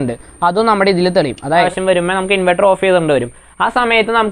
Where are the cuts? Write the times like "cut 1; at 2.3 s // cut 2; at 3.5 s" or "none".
cut 1; at 1.7 s